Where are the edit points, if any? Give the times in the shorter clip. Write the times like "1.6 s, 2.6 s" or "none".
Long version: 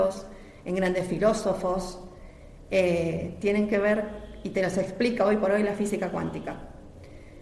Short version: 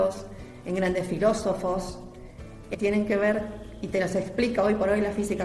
2.7 s